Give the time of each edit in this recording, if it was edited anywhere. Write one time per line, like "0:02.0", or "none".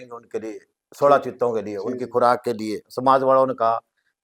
0:02.8